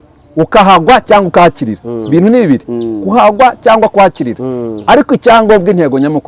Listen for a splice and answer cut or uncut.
uncut